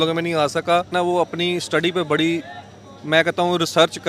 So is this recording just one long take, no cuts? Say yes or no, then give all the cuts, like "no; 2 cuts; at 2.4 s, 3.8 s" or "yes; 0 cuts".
no; 1 cut; at 0.9 s